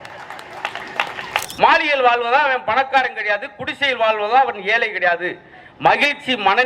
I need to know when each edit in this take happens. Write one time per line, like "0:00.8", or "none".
0:01.4